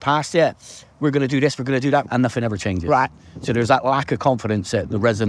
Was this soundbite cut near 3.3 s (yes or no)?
no